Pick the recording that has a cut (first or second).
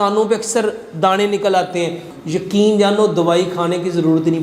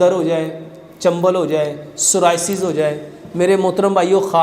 first